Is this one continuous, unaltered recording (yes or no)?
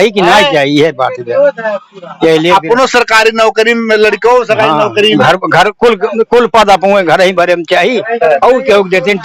yes